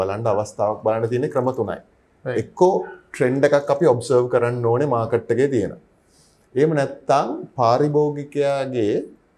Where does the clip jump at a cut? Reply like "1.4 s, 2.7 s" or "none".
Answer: none